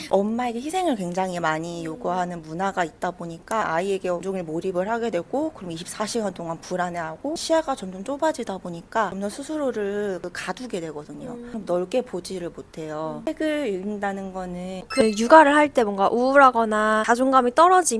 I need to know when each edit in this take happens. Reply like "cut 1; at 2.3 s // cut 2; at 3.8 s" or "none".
cut 1; at 3.6 s // cut 2; at 14.8 s